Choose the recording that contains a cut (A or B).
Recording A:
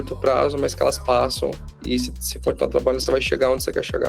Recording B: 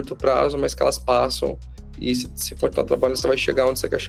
A